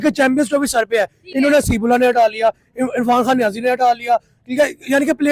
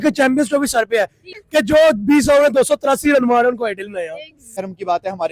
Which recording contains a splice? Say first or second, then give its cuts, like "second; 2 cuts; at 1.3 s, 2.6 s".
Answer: second; 2 cuts; at 1.3 s, 4.5 s